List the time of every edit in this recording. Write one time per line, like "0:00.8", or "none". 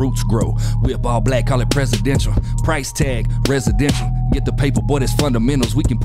none